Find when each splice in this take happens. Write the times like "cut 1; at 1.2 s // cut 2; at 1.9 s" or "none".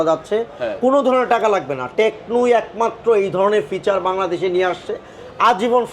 none

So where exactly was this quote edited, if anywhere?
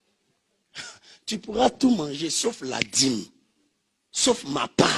none

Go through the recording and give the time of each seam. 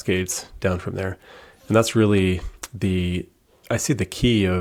none

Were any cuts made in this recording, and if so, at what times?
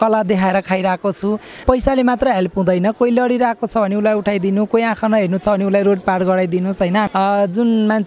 cut 1; at 1.6 s // cut 2; at 7.1 s

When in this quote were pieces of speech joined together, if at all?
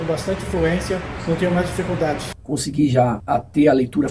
cut 1; at 2.3 s

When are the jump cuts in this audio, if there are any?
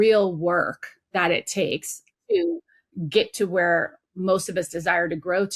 none

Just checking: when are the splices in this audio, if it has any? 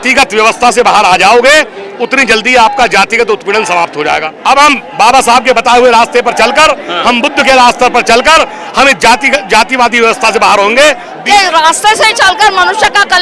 cut 1; at 4.3 s // cut 2; at 11.1 s

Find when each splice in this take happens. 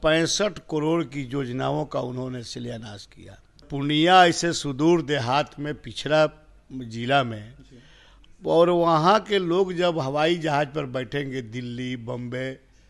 cut 1; at 3.7 s

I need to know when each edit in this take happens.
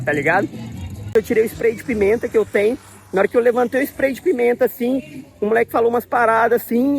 cut 1; at 1.1 s

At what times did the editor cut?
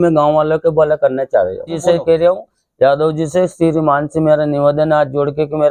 cut 1; at 1.7 s

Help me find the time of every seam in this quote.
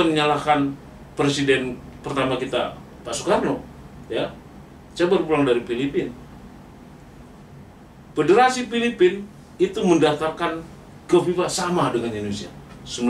none

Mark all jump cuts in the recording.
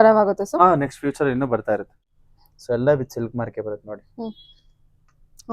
cut 1; at 1.9 s

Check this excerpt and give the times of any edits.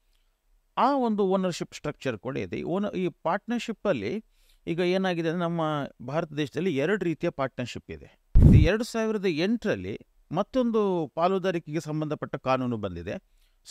cut 1; at 8.5 s

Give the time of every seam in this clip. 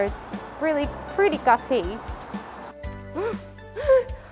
cut 1; at 2.4 s

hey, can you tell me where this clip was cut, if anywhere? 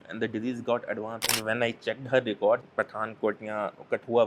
cut 1; at 1.2 s // cut 2; at 2.7 s

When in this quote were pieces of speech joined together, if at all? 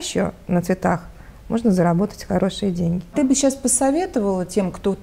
cut 1; at 3.1 s

